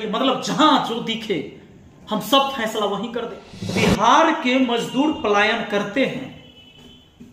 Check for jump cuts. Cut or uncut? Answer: cut